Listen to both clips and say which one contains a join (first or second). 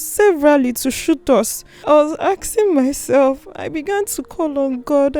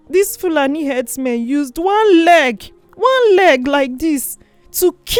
first